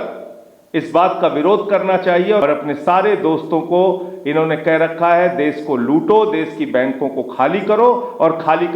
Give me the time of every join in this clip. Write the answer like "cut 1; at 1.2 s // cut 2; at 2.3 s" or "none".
cut 1; at 2.4 s